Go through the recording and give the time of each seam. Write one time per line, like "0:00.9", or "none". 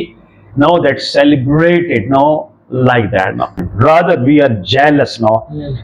0:03.7